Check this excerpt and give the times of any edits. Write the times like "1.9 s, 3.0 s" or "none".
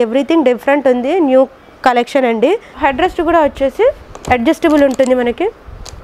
none